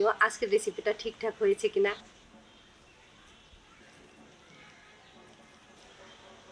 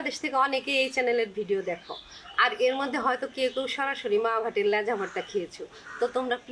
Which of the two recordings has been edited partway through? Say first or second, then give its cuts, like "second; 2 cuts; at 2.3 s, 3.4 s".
first; 3 cuts; at 2.0 s, 3.8 s, 5.8 s